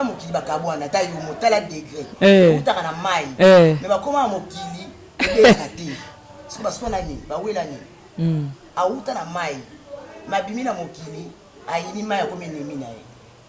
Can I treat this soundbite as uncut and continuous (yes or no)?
yes